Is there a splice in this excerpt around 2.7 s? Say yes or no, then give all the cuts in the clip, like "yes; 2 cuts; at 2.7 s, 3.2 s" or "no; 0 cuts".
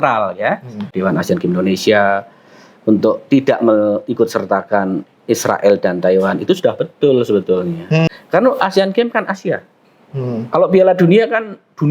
no; 2 cuts; at 0.9 s, 8.1 s